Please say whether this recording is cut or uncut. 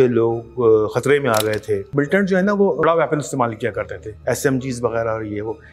cut